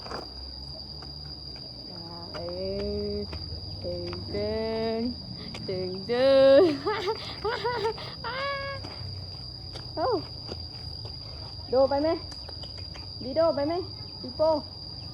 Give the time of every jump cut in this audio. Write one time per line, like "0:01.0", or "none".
none